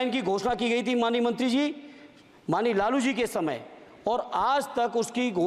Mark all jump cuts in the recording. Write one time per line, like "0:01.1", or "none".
none